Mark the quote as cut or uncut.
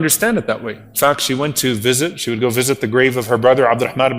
uncut